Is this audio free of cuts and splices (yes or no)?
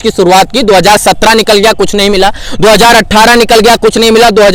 yes